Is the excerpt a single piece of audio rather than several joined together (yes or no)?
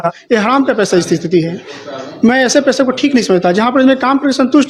yes